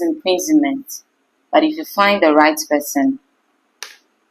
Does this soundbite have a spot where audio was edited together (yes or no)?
no